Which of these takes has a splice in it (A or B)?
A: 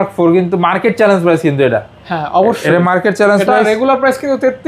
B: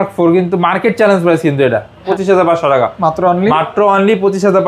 B